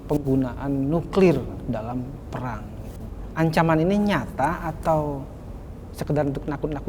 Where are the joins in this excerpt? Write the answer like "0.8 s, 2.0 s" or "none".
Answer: 3.2 s